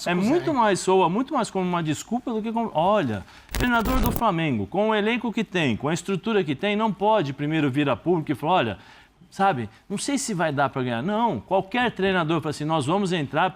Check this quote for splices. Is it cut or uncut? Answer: cut